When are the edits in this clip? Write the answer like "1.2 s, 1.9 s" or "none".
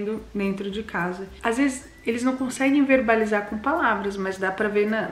1.3 s

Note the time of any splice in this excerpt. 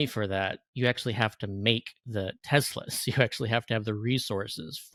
none

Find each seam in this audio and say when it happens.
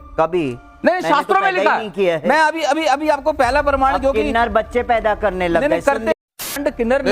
6.2 s

